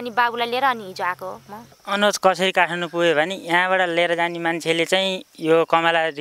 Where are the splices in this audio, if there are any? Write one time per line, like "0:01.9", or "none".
0:01.7